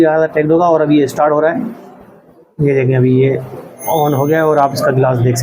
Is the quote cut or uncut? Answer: uncut